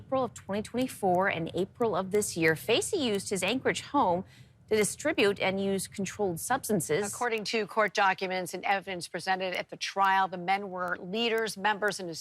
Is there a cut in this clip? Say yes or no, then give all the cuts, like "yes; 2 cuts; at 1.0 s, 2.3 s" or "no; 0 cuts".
yes; 1 cut; at 7.2 s